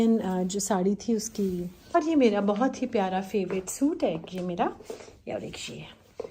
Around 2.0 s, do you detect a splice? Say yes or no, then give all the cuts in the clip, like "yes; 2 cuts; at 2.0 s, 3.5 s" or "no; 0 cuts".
yes; 1 cut; at 2.0 s